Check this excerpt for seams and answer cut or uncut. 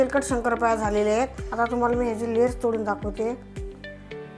cut